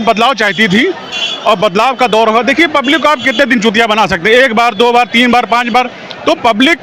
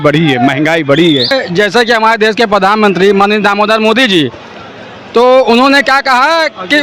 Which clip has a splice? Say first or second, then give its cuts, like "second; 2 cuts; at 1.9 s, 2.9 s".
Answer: second; 1 cut; at 1.3 s